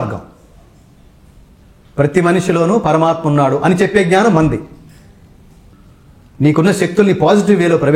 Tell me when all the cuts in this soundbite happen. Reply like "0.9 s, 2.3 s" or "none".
5.7 s